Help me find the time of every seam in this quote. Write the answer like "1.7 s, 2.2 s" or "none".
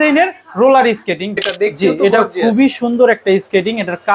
1.4 s